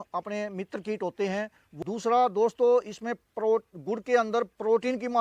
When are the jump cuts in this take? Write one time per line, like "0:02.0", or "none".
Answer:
0:01.6